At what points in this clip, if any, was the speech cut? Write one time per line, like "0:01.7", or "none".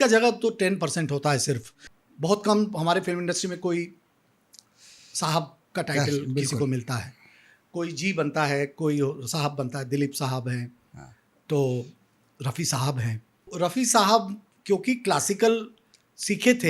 0:01.7
0:13.5